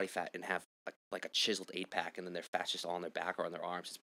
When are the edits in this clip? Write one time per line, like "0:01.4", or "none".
none